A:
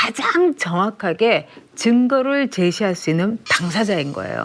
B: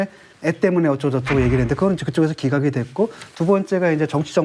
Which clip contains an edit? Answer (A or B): A